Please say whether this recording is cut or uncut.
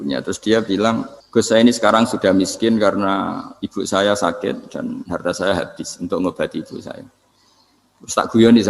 cut